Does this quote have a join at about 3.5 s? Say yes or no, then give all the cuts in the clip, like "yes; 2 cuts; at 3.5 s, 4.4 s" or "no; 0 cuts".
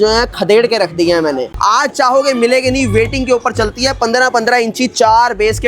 no; 1 cut; at 1.5 s